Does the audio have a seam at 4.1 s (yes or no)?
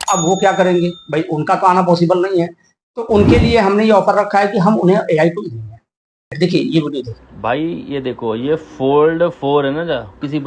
no